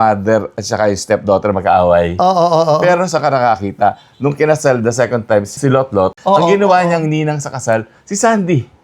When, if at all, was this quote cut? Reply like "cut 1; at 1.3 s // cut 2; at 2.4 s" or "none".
cut 1; at 6.2 s